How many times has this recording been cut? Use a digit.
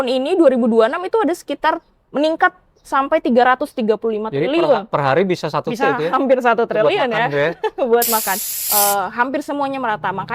1